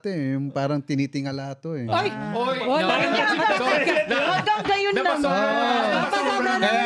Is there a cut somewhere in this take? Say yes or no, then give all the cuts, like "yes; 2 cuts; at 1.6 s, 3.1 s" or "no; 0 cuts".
no; 0 cuts